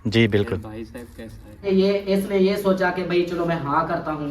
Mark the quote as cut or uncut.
cut